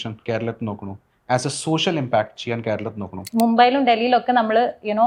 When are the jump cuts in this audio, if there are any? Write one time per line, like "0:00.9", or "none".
0:03.3